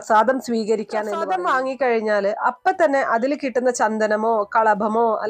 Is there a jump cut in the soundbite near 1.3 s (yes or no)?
yes